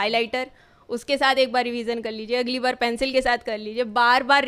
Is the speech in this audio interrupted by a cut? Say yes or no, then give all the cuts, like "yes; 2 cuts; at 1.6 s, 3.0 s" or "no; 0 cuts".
no; 0 cuts